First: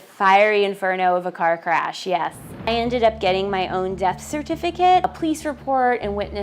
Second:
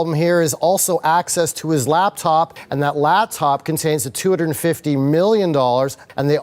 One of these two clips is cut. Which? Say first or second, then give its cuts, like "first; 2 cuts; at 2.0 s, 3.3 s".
first; 2 cuts; at 2.7 s, 5.1 s